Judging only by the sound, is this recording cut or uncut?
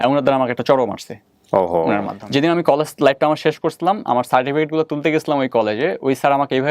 cut